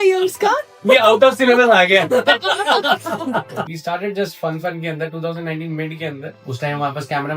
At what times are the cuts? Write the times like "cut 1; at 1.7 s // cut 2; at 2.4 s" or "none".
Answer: cut 1; at 3.6 s // cut 2; at 6.3 s